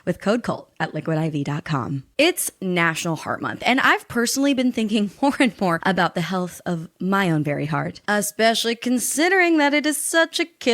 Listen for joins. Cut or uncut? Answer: cut